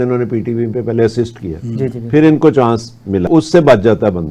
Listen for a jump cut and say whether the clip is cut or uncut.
cut